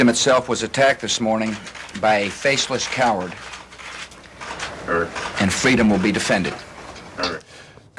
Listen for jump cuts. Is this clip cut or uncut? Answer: uncut